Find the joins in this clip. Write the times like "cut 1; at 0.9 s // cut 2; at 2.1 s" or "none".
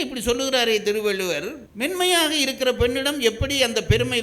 cut 1; at 1.6 s